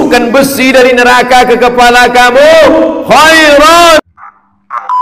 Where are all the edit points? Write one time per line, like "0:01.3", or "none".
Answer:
0:04.0